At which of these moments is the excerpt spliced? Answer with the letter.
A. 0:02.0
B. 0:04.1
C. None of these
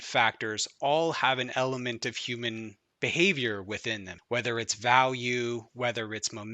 B